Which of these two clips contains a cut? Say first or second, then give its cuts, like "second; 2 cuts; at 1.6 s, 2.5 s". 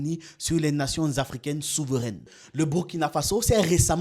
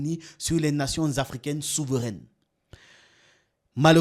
first; 1 cut; at 2.4 s